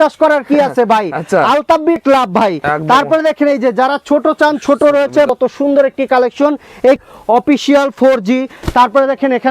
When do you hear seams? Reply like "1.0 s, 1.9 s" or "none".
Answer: 2.0 s, 5.3 s, 7.0 s